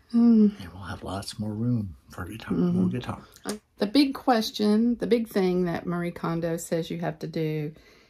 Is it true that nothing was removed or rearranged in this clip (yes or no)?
no